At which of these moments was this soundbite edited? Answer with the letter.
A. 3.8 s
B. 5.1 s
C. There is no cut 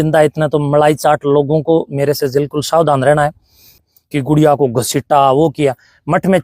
A